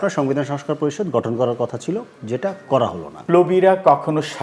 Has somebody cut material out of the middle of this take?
yes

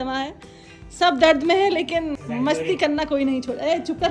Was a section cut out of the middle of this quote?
yes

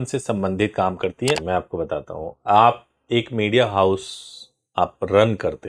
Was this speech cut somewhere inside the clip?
yes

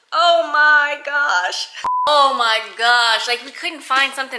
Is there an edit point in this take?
yes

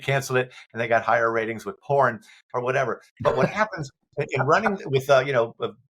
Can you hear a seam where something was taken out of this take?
no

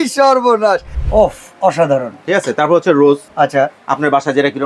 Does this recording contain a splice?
yes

